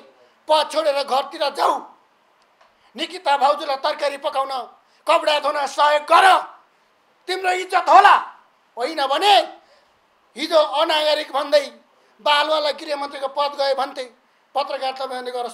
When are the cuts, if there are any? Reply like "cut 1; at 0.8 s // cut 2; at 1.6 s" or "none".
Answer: none